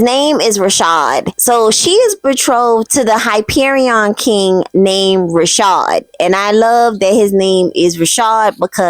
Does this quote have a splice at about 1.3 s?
yes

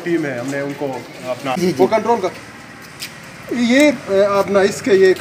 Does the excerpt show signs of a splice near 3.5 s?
no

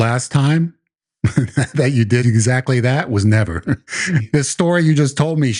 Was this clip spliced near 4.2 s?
yes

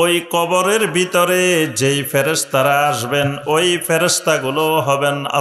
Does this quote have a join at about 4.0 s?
no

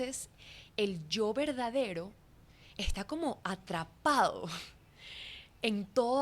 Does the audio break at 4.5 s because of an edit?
no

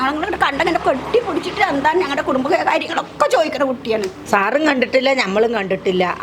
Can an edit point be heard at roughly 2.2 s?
no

